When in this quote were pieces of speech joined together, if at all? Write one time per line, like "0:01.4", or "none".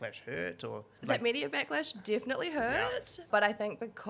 0:00.9
0:03.2